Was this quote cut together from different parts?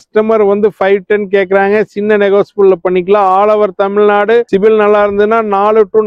no; 0 cuts

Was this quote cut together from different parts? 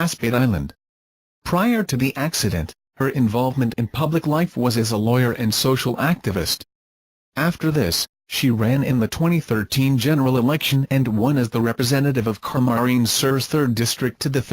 yes; 1 cut; at 5.7 s

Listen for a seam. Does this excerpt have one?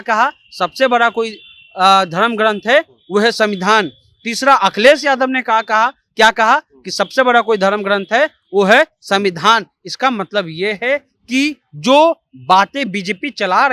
no; 0 cuts

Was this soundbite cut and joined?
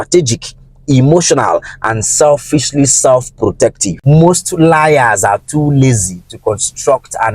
yes; 1 cut; at 3.9 s

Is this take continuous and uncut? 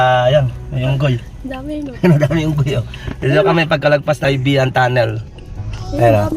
no; 1 cut; at 4.2 s

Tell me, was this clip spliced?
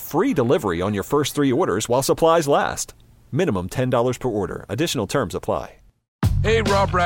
yes; 1 cut; at 6.2 s

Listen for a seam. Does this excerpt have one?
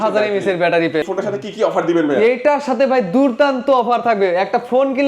yes; 1 cut; at 1.0 s

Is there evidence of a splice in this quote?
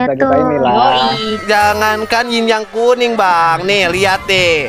yes; 1 cut; at 1.4 s

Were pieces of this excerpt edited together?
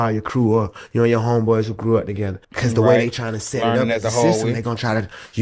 no; 0 cuts

